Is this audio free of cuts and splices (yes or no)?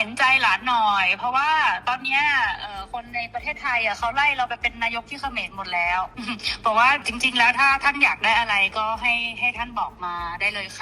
no